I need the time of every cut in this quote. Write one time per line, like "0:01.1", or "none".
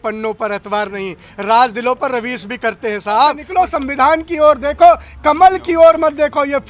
0:03.4

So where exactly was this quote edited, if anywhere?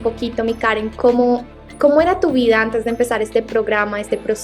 none

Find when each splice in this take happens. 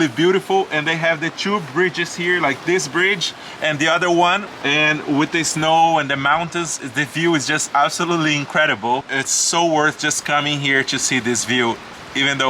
none

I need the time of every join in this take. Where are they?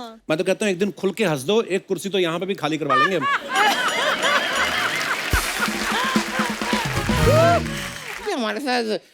0:08.2

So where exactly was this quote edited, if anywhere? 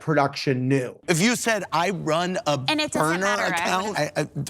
0:01.0

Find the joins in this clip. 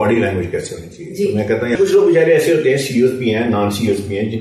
0:01.8

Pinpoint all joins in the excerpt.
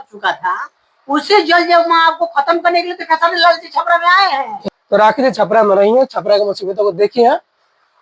0:04.6

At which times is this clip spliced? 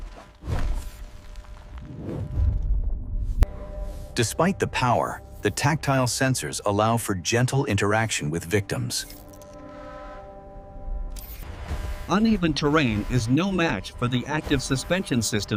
none

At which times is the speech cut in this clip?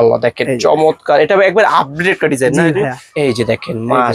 0:03.0

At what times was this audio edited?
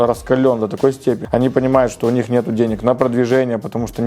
0:01.2

